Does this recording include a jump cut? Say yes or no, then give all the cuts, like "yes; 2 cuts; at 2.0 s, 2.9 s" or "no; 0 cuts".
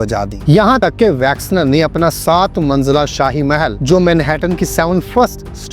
yes; 2 cuts; at 0.8 s, 3.8 s